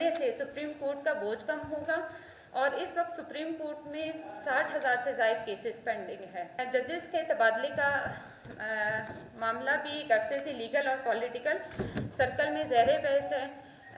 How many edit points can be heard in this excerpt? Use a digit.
1